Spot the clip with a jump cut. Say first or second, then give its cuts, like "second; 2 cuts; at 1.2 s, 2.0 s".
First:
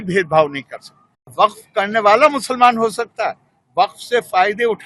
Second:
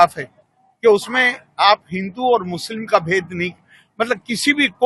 first; 1 cut; at 1.2 s